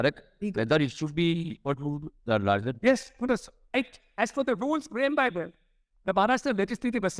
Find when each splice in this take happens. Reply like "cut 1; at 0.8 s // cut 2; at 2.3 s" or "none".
cut 1; at 3.6 s